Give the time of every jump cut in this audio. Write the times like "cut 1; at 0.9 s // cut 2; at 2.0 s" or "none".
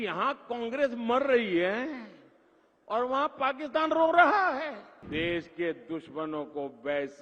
cut 1; at 4.9 s